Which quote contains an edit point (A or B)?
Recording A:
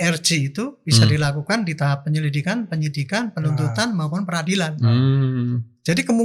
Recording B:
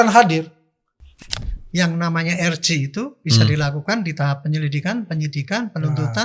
B